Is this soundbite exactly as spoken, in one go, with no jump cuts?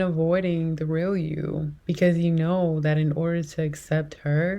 no; 1 cut; at 1.7 s

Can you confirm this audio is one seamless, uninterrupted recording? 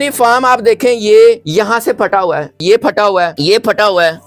no; 3 cuts; at 1.4 s, 2.6 s, 3.3 s

